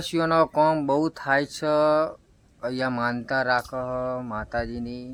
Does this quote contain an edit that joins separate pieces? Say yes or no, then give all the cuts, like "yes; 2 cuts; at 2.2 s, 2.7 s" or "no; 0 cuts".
no; 0 cuts